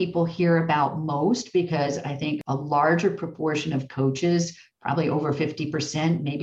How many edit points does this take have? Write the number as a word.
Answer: one